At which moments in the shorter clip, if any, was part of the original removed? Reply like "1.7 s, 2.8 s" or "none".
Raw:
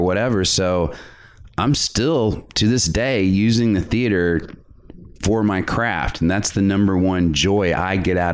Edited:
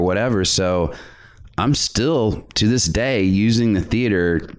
none